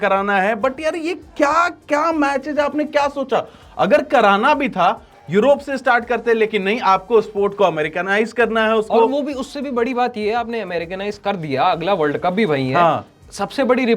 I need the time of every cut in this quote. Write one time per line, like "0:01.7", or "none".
none